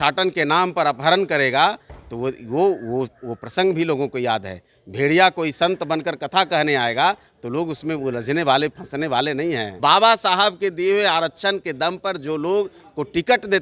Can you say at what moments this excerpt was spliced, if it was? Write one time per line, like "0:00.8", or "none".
0:09.7

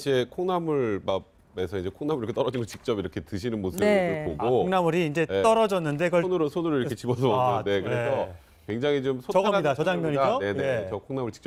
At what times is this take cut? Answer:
none

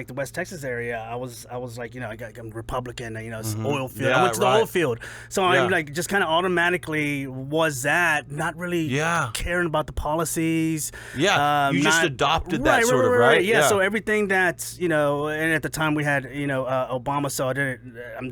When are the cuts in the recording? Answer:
none

